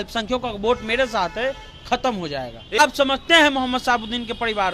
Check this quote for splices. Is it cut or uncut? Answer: cut